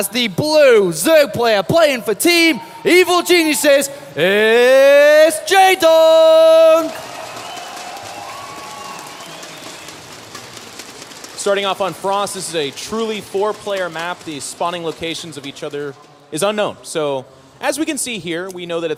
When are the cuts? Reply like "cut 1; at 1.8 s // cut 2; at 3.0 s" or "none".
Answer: none